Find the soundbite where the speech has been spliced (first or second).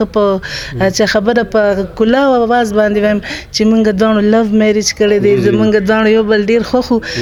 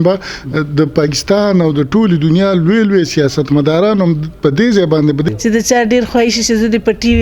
second